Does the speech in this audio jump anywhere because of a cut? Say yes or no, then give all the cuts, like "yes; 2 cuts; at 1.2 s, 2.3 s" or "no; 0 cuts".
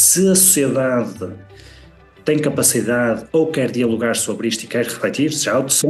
no; 0 cuts